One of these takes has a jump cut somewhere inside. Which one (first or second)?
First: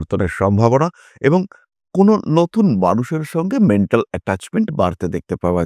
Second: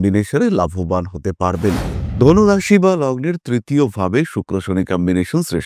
second